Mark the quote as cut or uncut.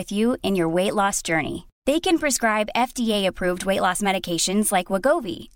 uncut